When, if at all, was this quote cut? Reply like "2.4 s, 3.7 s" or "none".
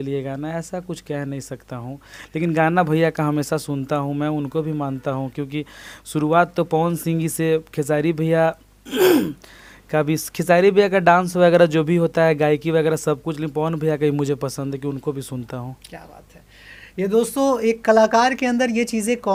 none